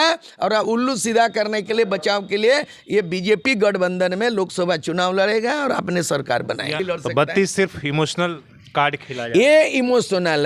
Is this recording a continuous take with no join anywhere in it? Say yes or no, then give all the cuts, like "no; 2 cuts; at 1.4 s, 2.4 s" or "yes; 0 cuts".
no; 1 cut; at 6.8 s